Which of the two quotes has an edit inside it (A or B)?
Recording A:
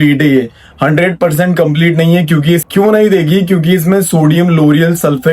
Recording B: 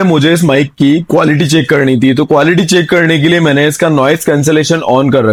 A